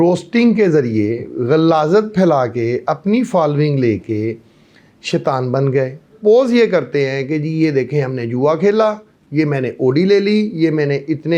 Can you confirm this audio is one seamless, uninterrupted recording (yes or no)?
no